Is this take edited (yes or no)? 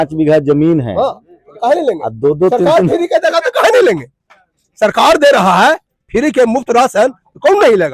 no